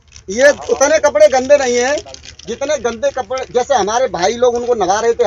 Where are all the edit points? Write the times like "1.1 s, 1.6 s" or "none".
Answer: none